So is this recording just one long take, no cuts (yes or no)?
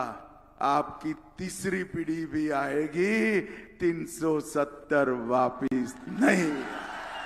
yes